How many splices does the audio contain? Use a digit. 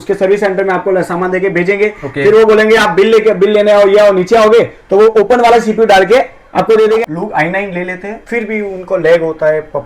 1